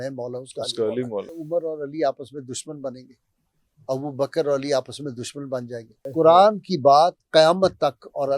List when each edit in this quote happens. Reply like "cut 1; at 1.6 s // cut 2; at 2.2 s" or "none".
cut 1; at 1.4 s // cut 2; at 6.1 s